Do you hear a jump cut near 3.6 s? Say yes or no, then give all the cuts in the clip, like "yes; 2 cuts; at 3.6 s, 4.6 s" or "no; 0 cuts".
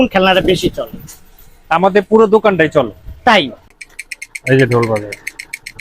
yes; 1 cut; at 3.6 s